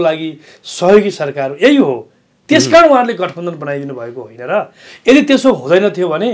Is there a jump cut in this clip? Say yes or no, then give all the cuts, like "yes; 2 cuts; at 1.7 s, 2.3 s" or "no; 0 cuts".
no; 0 cuts